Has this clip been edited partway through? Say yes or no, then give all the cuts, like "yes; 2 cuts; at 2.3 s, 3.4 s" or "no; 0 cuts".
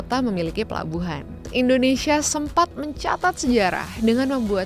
yes; 1 cut; at 1.4 s